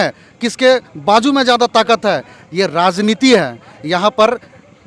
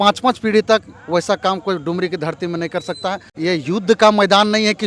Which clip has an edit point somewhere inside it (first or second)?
second